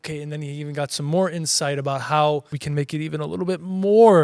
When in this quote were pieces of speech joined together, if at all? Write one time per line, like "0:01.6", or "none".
0:02.6